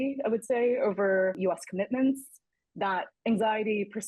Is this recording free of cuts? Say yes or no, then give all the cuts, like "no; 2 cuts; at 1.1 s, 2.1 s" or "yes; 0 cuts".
yes; 0 cuts